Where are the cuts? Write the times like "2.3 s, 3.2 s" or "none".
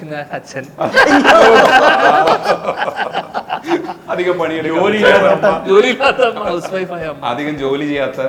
none